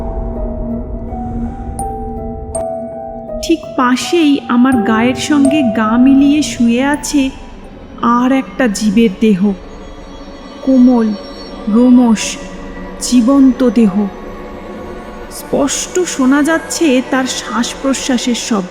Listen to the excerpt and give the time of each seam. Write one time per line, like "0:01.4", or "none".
0:02.7